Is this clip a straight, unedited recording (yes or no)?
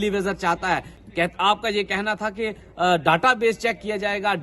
no